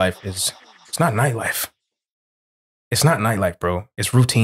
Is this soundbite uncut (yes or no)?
yes